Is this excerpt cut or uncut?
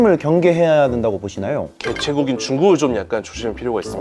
uncut